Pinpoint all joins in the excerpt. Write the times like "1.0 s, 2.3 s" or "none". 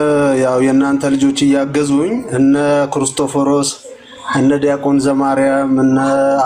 none